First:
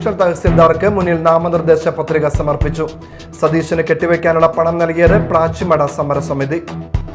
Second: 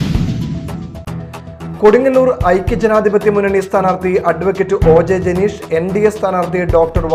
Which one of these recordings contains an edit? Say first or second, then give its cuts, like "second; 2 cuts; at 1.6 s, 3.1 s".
second; 1 cut; at 1.1 s